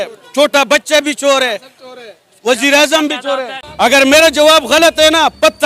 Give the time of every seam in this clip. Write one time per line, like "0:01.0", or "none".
none